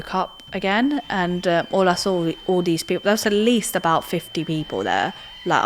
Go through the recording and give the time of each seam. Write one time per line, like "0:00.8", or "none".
none